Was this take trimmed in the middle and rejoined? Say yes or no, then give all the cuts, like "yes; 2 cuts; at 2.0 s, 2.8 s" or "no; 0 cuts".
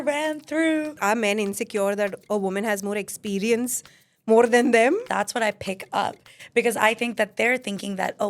yes; 2 cuts; at 1.0 s, 5.1 s